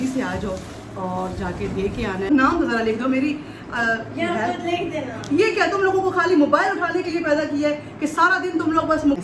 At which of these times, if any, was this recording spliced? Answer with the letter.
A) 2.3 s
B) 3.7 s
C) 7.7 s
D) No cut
A